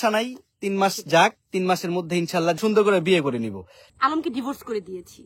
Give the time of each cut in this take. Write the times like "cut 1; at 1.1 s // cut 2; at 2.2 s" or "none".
cut 1; at 2.6 s // cut 2; at 3.8 s